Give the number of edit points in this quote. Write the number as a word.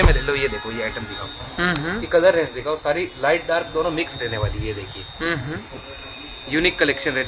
zero